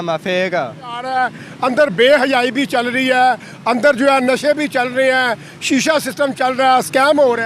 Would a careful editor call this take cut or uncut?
cut